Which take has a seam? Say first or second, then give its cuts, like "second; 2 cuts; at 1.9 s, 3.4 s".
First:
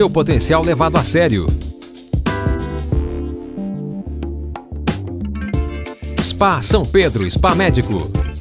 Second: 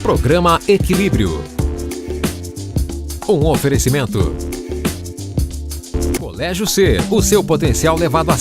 second; 1 cut; at 6.2 s